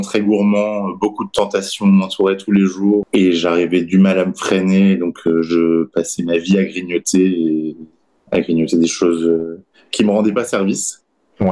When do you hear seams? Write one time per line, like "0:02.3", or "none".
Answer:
none

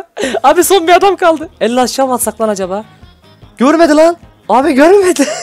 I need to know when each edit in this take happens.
0:04.3

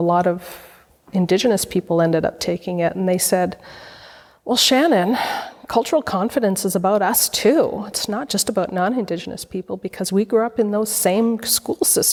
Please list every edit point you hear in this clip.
none

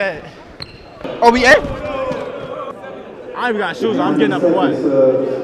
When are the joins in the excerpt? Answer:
0:01.1
0:02.7

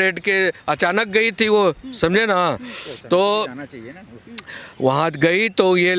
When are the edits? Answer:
none

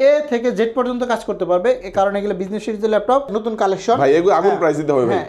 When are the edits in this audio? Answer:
0:03.3

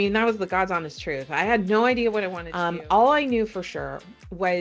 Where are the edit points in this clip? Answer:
0:02.4

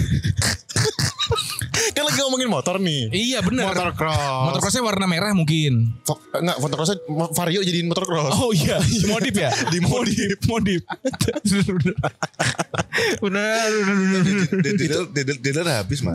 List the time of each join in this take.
none

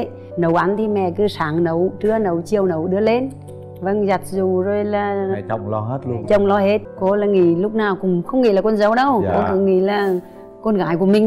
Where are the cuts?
0:06.9

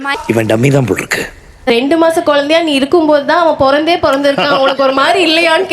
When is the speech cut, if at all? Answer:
0:01.7

